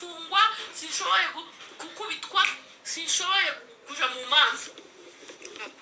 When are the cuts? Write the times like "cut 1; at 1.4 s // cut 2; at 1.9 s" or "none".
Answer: none